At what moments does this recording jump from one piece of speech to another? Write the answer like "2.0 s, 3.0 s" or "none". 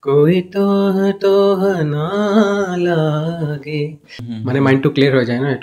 4.2 s